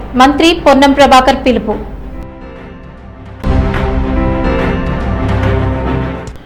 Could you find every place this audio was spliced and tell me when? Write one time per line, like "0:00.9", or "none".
none